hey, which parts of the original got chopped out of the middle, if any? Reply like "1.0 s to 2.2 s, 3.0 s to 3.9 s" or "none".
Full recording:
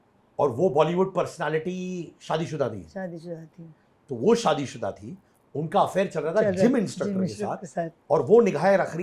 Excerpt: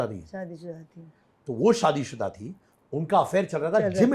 none

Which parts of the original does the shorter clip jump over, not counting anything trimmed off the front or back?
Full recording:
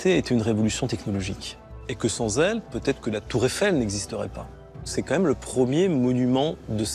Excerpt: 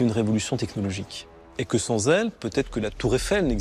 none

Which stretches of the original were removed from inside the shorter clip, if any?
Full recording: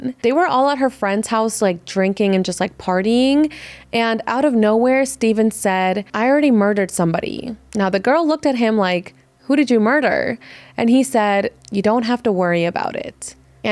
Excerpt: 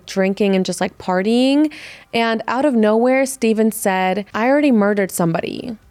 none

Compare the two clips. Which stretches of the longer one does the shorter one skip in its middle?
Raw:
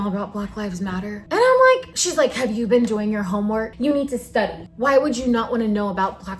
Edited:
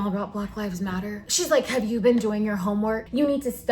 1.2 s to 1.9 s

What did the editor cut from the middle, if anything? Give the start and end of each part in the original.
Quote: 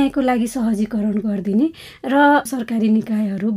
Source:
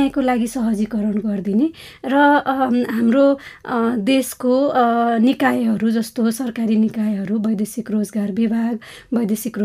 2.5 s to 6.4 s

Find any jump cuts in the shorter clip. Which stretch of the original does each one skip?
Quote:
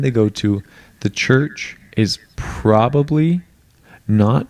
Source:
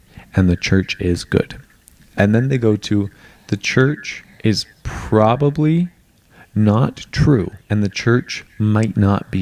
none

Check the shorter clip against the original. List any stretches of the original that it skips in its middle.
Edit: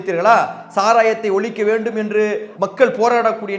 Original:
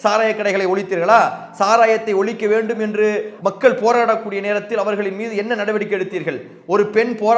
none

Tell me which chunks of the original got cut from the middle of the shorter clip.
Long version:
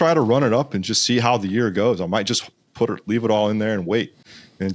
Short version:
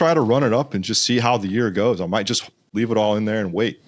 2.7 s to 3.0 s

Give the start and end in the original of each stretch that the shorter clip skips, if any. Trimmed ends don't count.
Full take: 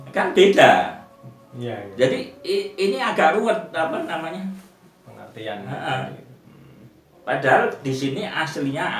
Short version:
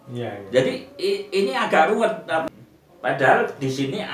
3.9 s to 6.7 s

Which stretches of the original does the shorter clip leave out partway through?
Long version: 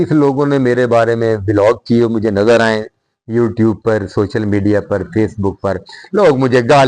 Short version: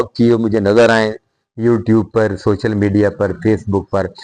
none

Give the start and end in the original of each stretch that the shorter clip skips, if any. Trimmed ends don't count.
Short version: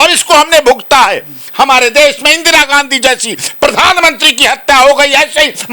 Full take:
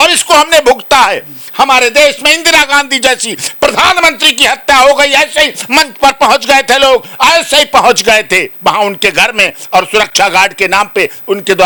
none

